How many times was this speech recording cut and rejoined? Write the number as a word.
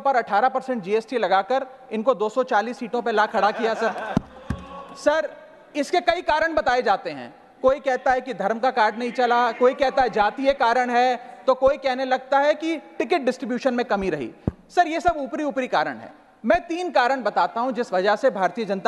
zero